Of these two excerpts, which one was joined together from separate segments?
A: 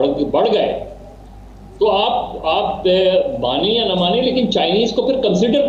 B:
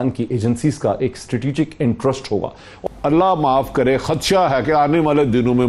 B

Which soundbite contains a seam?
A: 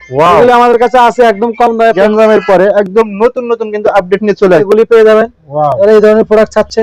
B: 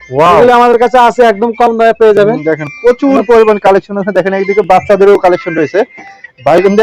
A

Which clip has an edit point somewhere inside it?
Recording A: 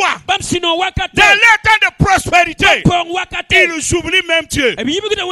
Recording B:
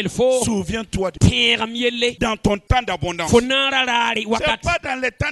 B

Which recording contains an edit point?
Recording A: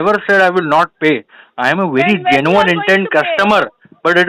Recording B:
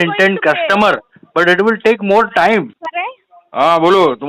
B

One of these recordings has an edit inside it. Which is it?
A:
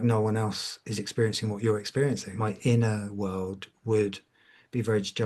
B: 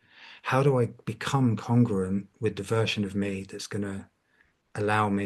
A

